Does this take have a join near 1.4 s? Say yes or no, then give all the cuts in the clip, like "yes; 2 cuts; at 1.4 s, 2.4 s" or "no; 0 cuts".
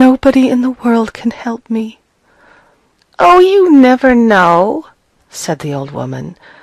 yes; 1 cut; at 1.4 s